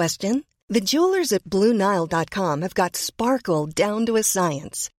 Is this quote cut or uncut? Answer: uncut